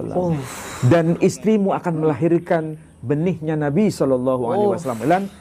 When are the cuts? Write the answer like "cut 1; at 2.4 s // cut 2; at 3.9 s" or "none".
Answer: none